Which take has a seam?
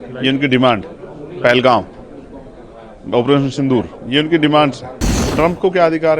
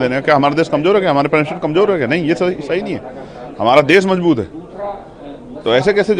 first; 1 cut; at 5.2 s

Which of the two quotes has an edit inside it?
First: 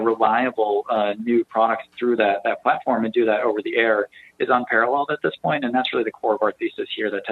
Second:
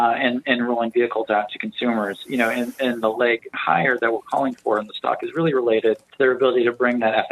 second; 1 cut; at 6.1 s

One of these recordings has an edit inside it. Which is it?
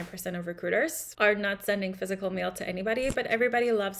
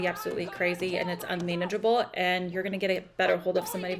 first; 1 cut; at 1.0 s

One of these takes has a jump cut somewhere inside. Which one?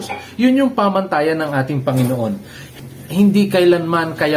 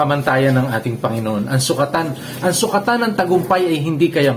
first; 1 cut; at 2.6 s

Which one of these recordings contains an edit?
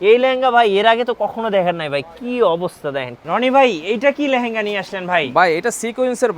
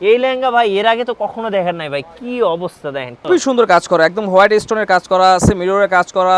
first; 1 cut; at 3.1 s

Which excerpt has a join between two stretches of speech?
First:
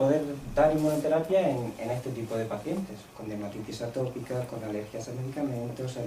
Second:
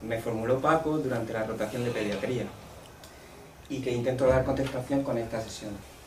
first; 1 cut; at 4.6 s

